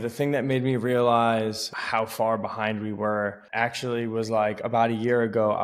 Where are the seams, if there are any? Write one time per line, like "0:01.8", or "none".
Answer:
0:01.7
0:03.4